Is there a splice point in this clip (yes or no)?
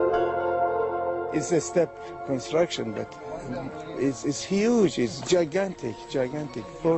no